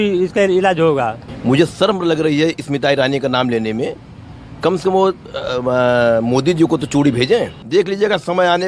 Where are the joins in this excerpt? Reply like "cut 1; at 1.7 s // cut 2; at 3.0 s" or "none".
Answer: cut 1; at 1.3 s // cut 2; at 7.6 s